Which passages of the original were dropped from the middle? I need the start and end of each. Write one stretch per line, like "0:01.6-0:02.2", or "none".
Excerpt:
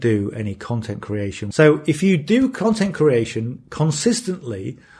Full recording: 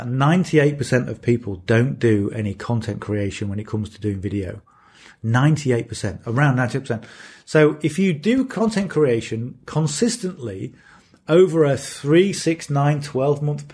0:03.4-0:07.4